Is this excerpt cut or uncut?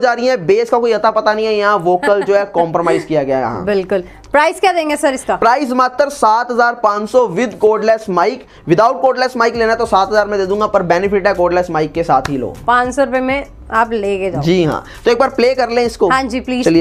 uncut